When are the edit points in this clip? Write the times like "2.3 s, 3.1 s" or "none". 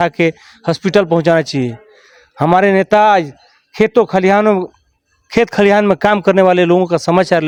none